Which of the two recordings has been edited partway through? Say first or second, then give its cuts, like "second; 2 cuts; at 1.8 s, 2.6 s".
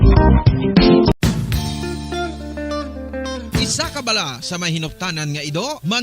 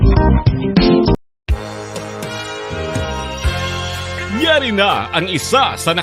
first; 1 cut; at 1.1 s